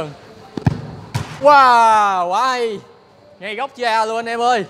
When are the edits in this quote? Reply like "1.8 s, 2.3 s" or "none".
3.2 s